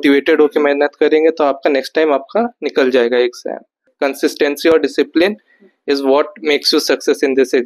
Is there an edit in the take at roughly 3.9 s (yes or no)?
yes